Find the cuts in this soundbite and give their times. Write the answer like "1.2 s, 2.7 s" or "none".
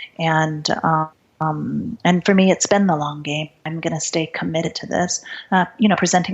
1.2 s, 3.6 s